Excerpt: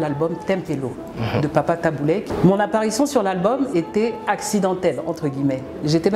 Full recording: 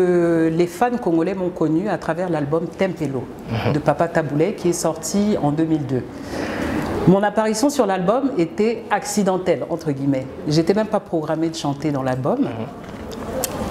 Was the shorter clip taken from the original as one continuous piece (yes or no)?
no